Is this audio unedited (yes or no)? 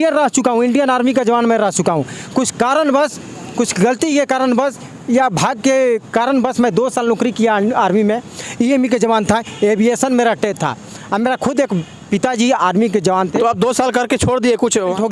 yes